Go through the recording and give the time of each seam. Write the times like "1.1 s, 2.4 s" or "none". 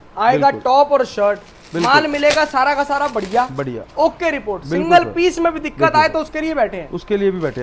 none